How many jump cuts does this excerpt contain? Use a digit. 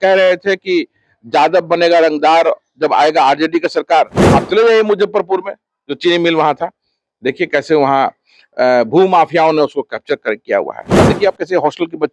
2